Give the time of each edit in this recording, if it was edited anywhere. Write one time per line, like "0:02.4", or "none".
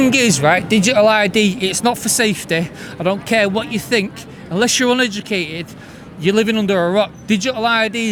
none